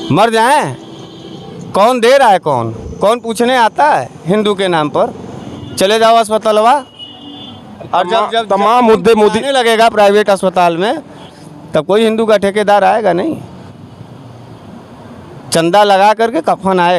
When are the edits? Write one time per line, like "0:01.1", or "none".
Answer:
none